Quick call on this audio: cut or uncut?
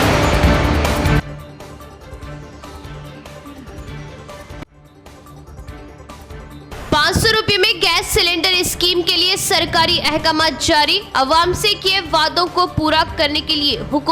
uncut